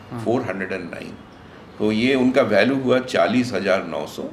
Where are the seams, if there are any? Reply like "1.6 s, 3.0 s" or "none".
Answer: none